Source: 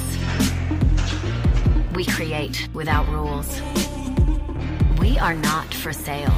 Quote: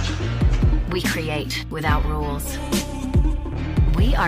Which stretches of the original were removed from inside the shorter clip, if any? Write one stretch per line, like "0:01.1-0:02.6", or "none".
none